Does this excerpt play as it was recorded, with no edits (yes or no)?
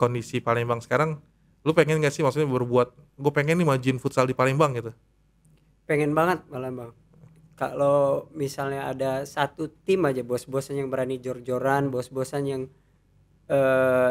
yes